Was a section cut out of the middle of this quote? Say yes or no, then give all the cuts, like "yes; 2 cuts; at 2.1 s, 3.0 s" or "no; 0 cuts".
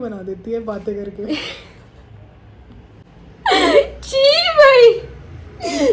no; 0 cuts